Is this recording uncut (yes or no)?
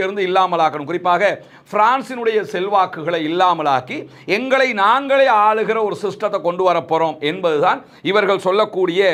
yes